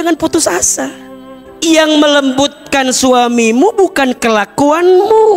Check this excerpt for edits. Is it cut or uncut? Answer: uncut